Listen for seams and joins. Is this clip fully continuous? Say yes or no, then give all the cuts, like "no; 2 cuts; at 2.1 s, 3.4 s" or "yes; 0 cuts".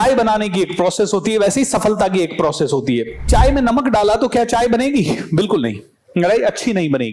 no; 1 cut; at 3.3 s